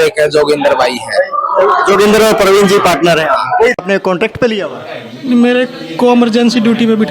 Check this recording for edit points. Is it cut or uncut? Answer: cut